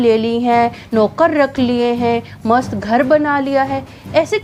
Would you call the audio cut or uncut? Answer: uncut